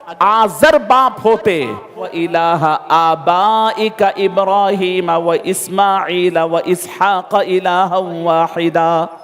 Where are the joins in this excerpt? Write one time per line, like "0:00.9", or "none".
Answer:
0:02.1